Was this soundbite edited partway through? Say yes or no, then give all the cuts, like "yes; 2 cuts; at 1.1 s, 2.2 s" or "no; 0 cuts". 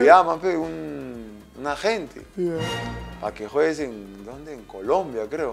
no; 0 cuts